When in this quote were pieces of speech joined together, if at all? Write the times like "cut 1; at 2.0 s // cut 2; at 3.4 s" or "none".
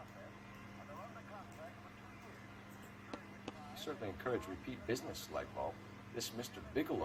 none

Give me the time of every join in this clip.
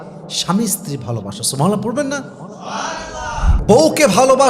cut 1; at 3.5 s

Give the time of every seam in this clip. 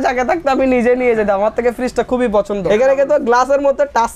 cut 1; at 2.6 s

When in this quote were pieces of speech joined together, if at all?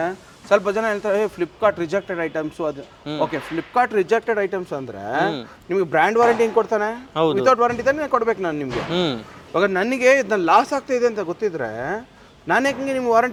none

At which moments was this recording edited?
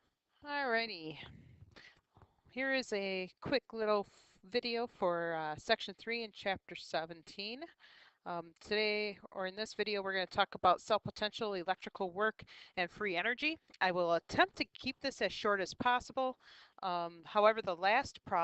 cut 1; at 17.1 s

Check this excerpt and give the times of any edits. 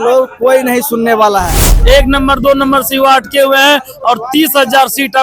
cut 1; at 1.7 s

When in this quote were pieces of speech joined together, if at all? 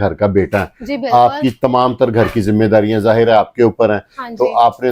none

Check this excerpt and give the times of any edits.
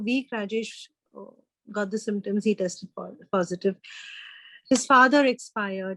none

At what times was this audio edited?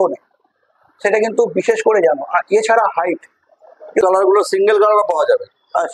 cut 1; at 4.0 s

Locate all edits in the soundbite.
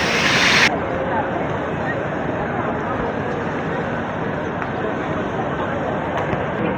none

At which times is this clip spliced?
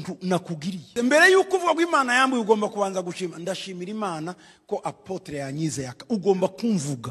cut 1; at 0.9 s

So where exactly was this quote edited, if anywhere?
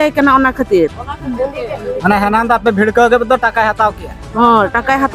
none

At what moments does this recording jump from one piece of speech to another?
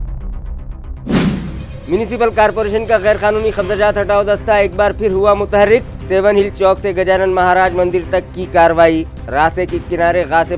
none

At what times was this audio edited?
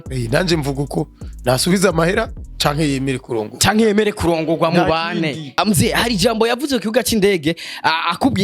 cut 1; at 5.6 s

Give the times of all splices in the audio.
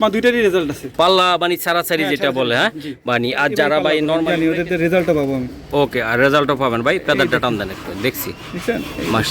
cut 1; at 4.2 s

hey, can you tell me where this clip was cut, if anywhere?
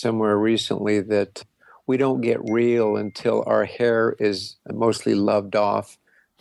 none

